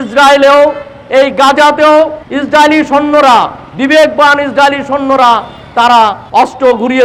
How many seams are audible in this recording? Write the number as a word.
zero